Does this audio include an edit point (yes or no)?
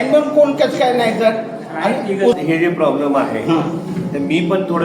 yes